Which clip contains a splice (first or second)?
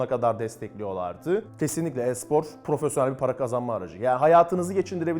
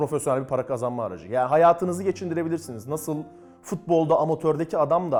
first